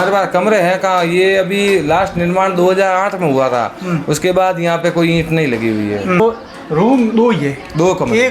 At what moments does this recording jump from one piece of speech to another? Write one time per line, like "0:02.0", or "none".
0:06.2